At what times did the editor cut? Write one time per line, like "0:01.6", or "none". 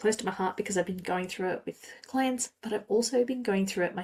none